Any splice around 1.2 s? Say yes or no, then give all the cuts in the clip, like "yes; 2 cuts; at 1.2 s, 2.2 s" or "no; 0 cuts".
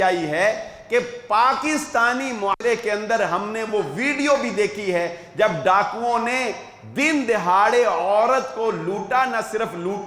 no; 1 cut; at 2.6 s